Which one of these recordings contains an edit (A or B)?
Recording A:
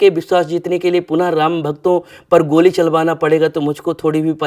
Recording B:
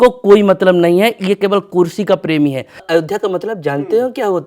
B